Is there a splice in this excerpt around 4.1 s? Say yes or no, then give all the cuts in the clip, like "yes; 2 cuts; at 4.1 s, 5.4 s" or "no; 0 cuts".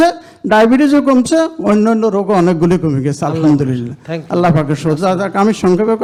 no; 0 cuts